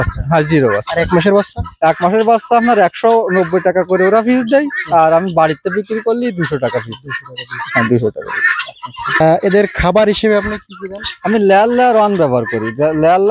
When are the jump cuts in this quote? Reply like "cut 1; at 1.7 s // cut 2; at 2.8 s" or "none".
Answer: none